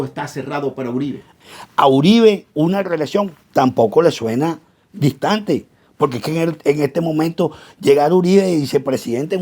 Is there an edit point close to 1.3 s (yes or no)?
yes